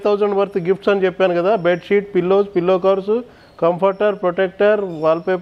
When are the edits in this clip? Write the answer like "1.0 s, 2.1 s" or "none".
none